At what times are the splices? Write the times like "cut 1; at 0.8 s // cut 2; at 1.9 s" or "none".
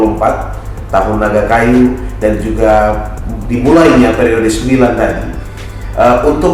none